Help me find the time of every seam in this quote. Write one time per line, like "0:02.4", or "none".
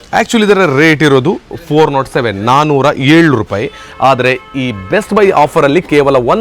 none